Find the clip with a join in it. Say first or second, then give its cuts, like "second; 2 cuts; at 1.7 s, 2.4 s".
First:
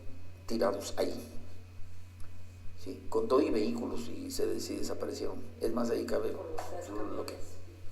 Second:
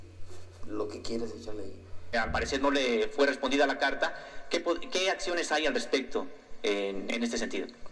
second; 1 cut; at 2.0 s